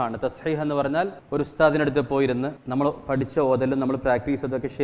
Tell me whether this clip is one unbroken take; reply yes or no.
no